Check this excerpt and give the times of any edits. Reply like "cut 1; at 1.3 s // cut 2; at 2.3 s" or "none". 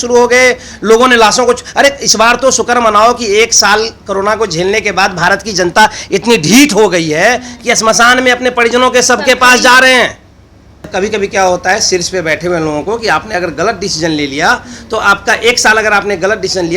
cut 1; at 10.9 s